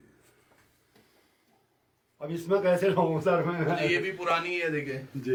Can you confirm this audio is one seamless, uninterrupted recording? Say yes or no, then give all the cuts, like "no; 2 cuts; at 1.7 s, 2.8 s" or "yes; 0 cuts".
yes; 0 cuts